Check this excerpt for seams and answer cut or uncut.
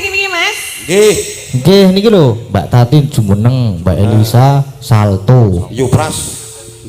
cut